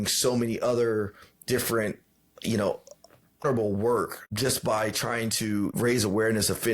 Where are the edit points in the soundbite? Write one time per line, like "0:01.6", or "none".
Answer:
0:03.4
0:04.2
0:05.7